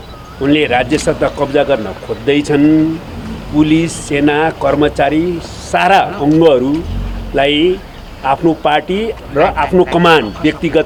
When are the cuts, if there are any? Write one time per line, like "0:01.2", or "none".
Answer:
none